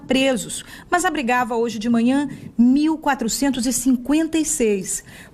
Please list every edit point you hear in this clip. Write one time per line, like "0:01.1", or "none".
none